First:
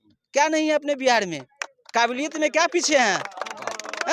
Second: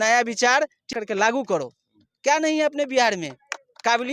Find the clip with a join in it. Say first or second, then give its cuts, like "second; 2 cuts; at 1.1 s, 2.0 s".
second; 1 cut; at 0.9 s